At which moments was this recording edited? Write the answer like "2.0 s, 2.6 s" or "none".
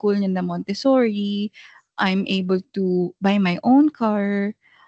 none